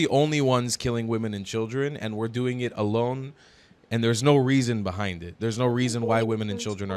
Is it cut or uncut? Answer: uncut